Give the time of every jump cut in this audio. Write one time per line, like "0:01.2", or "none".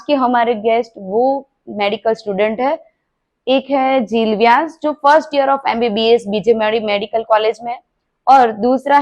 none